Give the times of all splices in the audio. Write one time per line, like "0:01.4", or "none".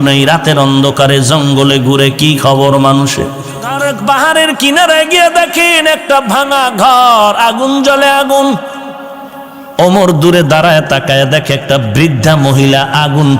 0:03.8